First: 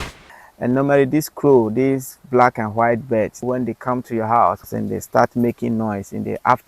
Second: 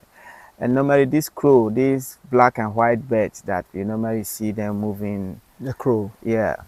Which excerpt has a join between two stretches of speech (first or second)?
first